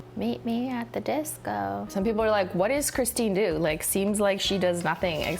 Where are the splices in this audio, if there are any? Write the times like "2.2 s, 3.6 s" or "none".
1.9 s